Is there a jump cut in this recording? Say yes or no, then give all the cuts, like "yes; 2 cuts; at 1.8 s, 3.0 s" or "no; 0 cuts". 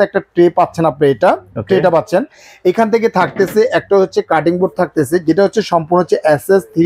no; 0 cuts